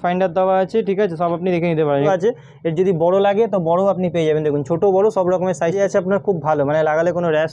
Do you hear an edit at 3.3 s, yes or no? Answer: no